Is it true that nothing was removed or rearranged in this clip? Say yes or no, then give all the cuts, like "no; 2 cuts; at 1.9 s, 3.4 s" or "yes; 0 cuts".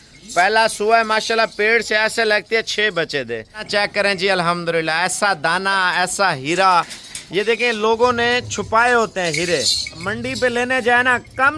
no; 2 cuts; at 3.6 s, 10.1 s